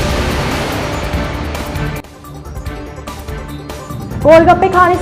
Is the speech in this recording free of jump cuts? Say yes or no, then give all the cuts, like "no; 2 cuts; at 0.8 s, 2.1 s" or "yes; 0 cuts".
no; 1 cut; at 3.3 s